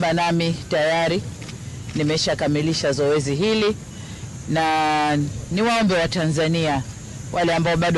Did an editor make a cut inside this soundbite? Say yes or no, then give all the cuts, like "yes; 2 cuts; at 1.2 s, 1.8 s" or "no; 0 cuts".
no; 0 cuts